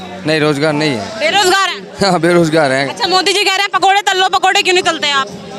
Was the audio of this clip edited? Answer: no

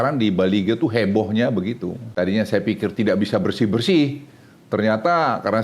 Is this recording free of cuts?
no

